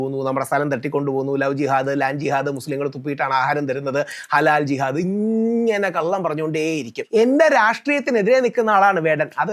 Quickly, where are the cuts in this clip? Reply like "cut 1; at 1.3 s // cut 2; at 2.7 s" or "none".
cut 1; at 6.9 s